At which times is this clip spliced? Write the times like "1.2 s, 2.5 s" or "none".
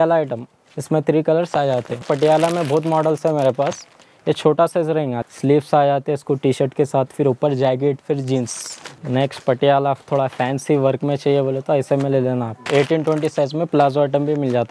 2.0 s, 5.2 s, 8.9 s, 12.6 s